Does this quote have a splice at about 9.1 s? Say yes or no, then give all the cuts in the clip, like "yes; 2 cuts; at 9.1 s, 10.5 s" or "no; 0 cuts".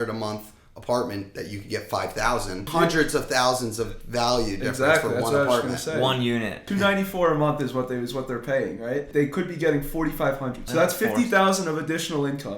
yes; 4 cuts; at 2.7 s, 6.7 s, 9.1 s, 10.7 s